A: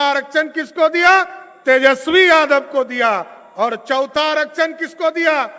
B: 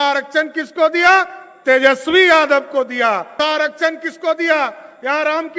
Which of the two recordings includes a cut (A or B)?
B